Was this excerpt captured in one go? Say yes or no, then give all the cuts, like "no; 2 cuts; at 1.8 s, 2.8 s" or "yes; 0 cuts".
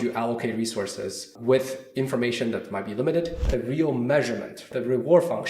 no; 3 cuts; at 1.3 s, 3.5 s, 4.6 s